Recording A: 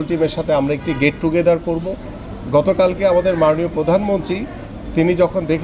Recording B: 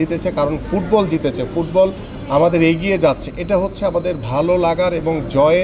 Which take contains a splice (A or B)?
A